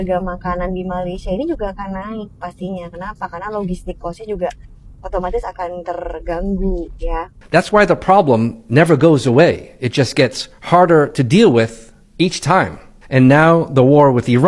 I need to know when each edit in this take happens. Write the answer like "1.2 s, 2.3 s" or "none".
7.3 s